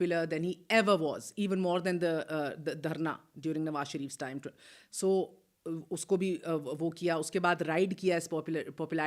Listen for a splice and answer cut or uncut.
uncut